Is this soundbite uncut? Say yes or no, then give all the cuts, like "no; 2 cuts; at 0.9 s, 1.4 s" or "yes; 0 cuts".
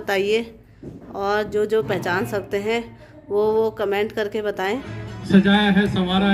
no; 1 cut; at 4.8 s